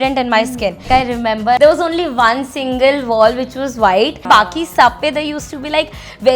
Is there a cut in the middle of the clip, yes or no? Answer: yes